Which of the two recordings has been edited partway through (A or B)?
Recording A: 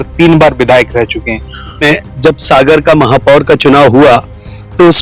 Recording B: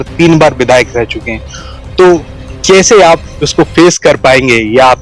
A